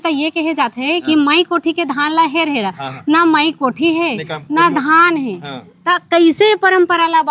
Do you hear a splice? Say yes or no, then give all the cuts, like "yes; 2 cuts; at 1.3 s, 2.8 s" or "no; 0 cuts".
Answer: no; 0 cuts